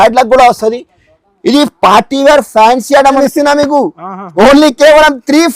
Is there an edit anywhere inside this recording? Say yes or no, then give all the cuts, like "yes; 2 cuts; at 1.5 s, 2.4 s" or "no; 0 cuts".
yes; 1 cut; at 3.2 s